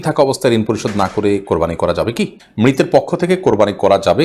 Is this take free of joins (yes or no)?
no